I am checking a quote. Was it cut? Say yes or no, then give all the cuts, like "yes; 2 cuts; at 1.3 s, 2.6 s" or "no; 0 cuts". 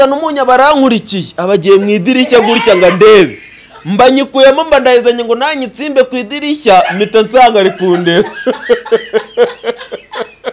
no; 0 cuts